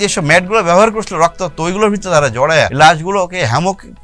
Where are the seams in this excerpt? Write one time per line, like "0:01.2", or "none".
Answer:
0:02.7